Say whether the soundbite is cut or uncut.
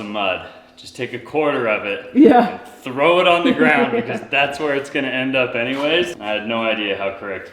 cut